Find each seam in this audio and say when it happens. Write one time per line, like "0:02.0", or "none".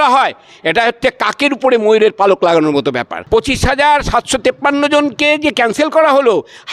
0:03.1